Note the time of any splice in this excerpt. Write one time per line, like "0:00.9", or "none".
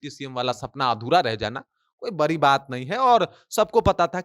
none